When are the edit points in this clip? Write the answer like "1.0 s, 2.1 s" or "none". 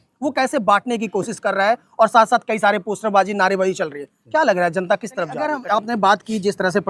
5.6 s